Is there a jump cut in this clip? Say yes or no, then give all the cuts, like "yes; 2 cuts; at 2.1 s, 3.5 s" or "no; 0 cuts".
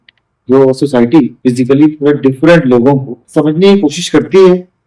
yes; 2 cuts; at 1.3 s, 3.2 s